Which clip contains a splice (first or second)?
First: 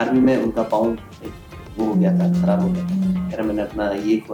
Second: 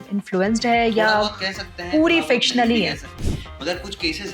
second